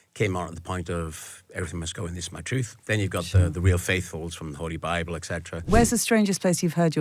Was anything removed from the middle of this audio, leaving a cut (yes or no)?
yes